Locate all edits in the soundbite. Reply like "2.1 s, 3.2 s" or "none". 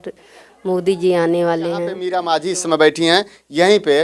2.0 s